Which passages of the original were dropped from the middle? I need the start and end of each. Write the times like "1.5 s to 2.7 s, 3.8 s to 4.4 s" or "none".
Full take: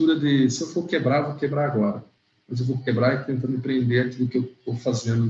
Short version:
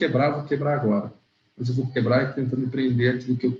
none